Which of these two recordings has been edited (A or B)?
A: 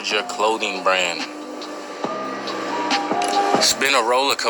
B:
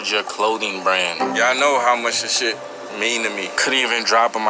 B